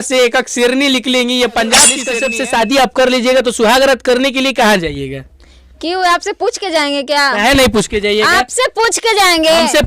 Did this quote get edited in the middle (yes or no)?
yes